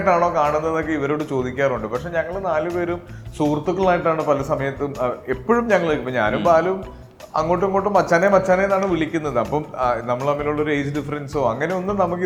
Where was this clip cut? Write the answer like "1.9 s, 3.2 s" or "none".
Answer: none